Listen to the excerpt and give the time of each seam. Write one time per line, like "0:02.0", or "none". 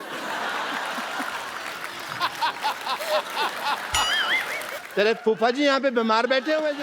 0:04.8